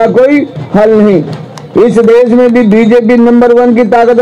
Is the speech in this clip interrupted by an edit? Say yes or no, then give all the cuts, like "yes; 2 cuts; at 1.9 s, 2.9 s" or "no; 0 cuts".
no; 0 cuts